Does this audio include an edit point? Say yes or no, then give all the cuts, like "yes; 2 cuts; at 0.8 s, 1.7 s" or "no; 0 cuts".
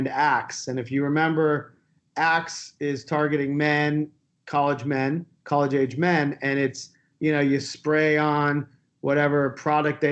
no; 0 cuts